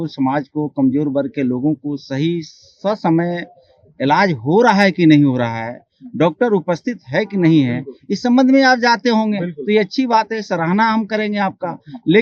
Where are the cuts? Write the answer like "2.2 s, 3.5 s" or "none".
none